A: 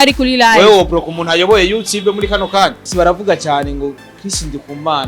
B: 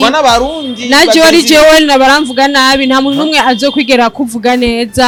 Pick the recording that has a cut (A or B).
A